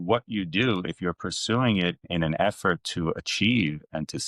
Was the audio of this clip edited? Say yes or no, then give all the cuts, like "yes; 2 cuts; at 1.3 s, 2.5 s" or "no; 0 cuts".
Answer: yes; 1 cut; at 2.0 s